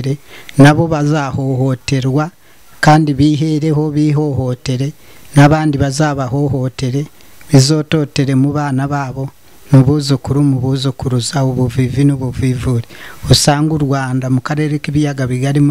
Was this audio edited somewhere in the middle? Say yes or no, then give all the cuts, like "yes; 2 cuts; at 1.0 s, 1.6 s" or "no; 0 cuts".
no; 0 cuts